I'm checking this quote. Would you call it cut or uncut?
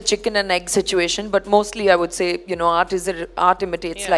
uncut